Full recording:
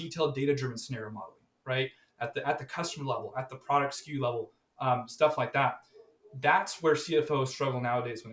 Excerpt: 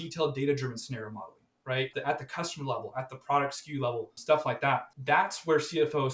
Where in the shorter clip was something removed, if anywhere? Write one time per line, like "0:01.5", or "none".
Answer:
0:01.9
0:04.2
0:04.9